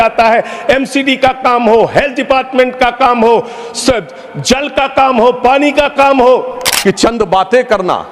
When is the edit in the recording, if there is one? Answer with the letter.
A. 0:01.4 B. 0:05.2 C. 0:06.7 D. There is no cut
C